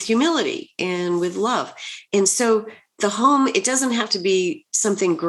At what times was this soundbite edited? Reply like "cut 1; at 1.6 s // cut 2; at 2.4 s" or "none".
cut 1; at 2.0 s